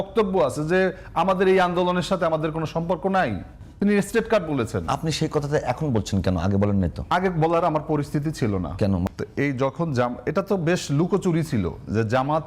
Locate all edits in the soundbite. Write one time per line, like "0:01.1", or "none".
0:09.1